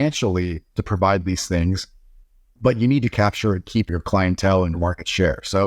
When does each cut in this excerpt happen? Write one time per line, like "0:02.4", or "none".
0:03.1
0:04.7